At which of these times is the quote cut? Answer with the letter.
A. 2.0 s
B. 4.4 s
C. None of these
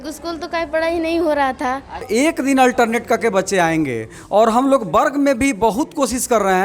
A